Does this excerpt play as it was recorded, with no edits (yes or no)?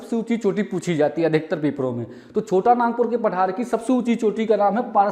yes